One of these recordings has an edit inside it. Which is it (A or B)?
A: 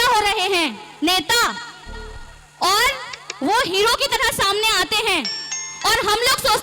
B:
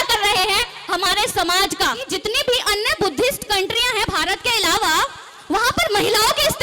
B